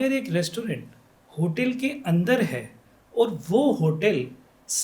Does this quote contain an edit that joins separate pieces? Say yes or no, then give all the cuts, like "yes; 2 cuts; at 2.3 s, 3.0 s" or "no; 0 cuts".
no; 0 cuts